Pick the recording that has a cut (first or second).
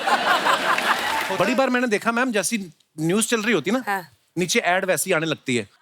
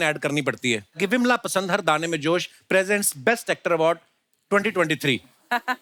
first